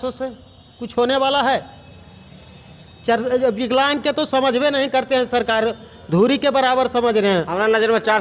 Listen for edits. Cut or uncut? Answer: uncut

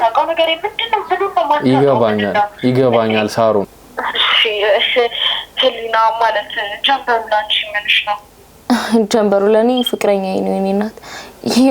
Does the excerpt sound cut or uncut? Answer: cut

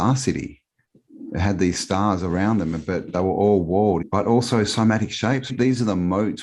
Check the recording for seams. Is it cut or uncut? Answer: cut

